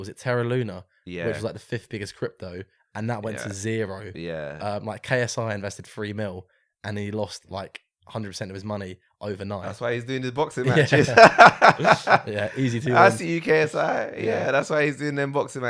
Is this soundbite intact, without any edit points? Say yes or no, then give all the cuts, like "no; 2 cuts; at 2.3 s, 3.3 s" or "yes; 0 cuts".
yes; 0 cuts